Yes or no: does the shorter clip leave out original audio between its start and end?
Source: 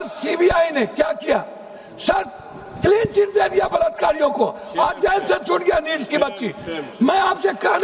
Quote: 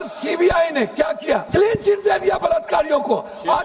yes